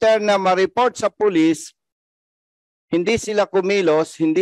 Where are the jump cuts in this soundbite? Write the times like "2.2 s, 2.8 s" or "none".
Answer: none